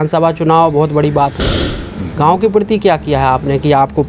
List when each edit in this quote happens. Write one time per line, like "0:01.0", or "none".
0:01.4